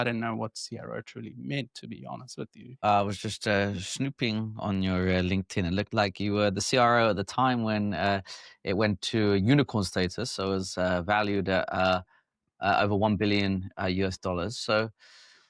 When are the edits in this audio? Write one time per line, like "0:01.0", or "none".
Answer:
0:02.8